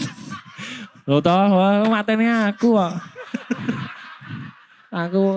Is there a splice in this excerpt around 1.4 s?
no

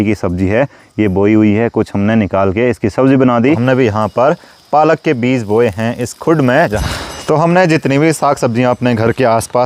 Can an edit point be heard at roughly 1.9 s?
no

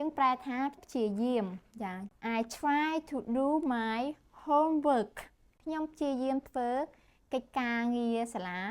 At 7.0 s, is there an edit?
no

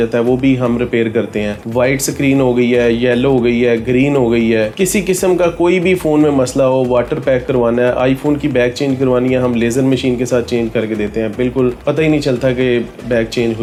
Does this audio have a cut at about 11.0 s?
no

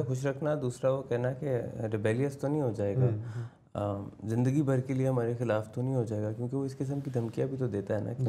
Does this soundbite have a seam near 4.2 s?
no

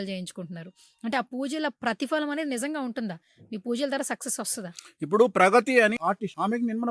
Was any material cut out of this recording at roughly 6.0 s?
yes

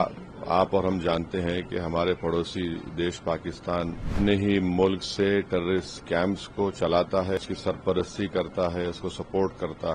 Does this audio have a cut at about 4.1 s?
yes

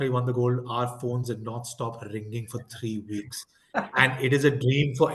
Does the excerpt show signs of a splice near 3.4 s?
no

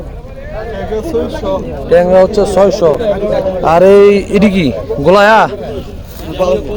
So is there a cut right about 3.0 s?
no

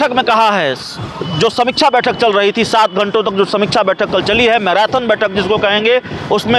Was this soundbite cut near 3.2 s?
no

